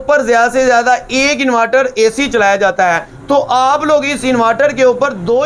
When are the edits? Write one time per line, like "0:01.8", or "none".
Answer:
0:03.1